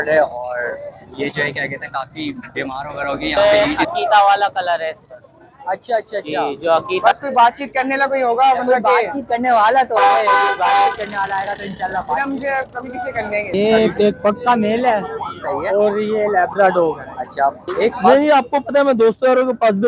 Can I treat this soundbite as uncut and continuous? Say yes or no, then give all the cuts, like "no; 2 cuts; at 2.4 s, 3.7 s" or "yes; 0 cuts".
no; 4 cuts; at 3.4 s, 7.0 s, 13.5 s, 18.1 s